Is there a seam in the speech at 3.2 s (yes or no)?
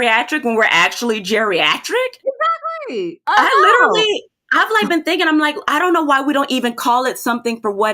yes